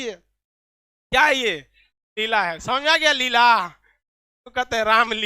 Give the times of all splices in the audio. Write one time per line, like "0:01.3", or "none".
none